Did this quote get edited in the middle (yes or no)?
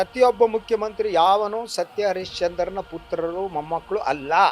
no